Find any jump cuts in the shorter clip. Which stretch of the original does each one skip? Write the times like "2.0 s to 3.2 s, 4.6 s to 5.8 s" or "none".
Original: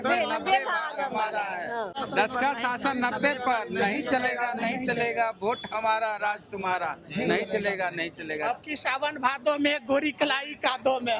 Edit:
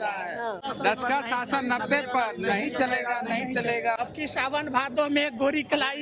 5.3 s to 8.5 s